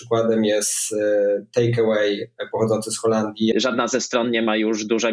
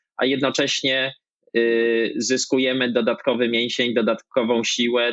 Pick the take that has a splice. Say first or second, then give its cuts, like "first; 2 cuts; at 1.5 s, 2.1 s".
first; 1 cut; at 3.5 s